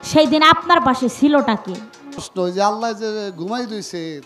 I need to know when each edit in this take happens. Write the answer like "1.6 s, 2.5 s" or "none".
2.3 s